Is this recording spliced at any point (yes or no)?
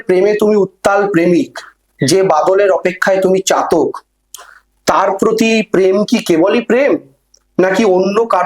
no